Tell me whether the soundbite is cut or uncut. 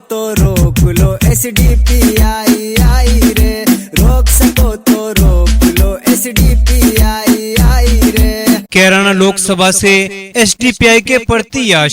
cut